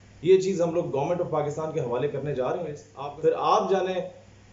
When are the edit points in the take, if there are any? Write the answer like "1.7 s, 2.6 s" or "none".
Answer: 2.9 s